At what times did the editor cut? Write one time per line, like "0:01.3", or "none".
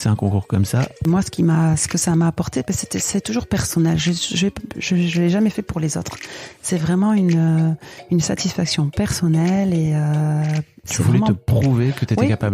0:01.1

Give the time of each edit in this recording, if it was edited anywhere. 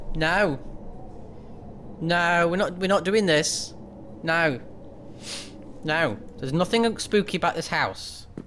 none

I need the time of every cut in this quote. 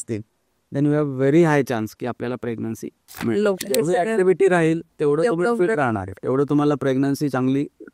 0:03.6
0:06.1

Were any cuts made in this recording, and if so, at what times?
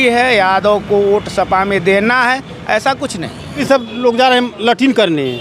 0:03.6

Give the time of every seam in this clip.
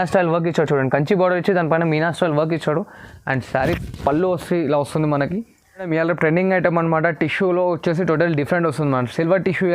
0:05.9

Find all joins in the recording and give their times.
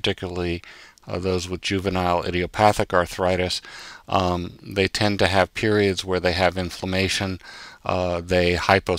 none

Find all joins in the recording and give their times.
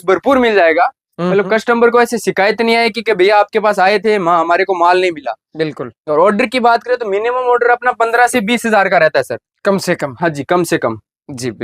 none

